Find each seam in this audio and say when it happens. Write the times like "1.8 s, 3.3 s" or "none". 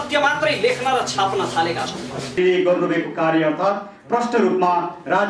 2.4 s